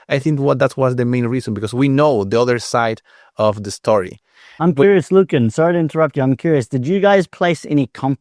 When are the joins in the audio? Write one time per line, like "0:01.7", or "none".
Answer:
0:04.5